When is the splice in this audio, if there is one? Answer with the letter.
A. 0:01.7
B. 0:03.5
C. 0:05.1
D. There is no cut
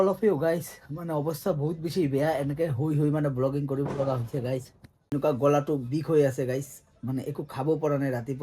C